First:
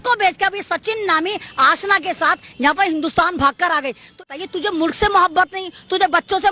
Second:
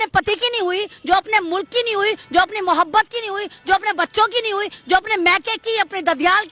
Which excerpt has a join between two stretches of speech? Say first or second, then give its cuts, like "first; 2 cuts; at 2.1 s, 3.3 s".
first; 1 cut; at 4.3 s